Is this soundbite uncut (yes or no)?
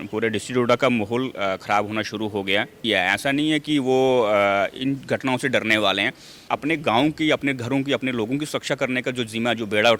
no